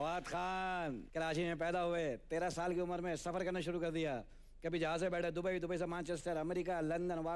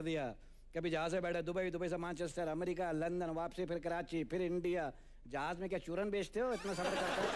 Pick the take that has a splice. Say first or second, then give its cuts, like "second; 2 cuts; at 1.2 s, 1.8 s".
first; 1 cut; at 1.0 s